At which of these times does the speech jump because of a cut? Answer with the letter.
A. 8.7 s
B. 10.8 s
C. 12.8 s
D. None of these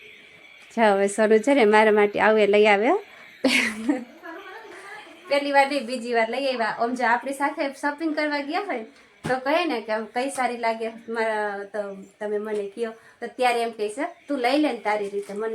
D